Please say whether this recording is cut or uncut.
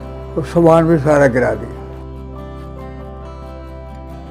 uncut